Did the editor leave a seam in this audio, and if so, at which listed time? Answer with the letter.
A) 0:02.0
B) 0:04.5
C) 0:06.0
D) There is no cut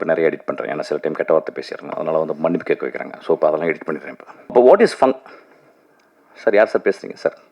B